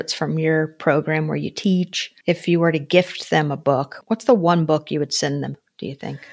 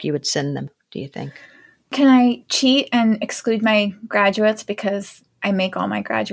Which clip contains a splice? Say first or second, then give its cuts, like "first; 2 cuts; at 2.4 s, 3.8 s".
first; 2 cuts; at 2.0 s, 4.0 s